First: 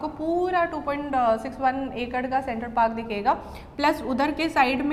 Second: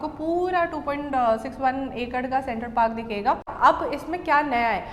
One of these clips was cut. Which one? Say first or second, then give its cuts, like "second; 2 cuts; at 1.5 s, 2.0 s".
second; 1 cut; at 3.5 s